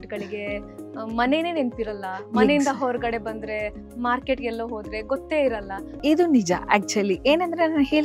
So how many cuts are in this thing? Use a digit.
1